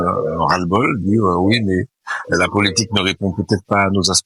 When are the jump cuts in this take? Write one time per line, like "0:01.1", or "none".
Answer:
none